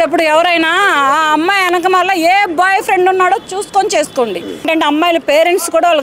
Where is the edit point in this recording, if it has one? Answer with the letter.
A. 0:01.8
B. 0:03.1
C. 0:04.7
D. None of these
C